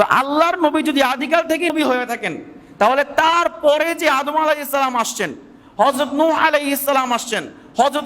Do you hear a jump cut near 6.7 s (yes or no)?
no